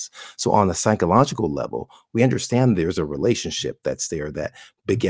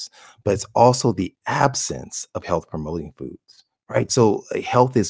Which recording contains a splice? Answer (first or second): second